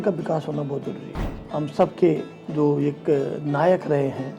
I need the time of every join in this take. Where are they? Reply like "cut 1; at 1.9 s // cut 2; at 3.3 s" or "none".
cut 1; at 1.4 s

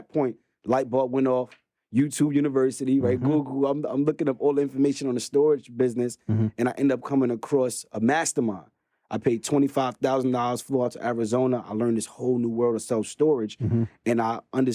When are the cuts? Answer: none

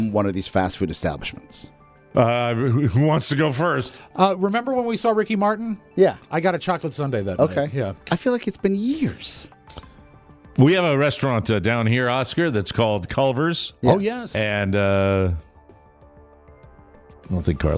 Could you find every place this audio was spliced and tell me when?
cut 1; at 1.9 s

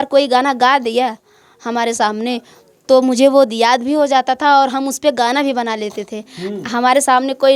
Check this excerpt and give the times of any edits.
none

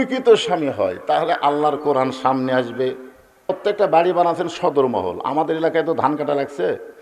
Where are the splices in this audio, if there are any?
cut 1; at 3.6 s

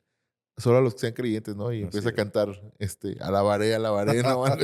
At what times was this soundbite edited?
none

